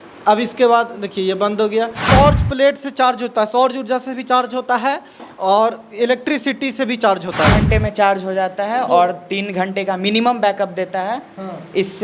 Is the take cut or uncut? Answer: cut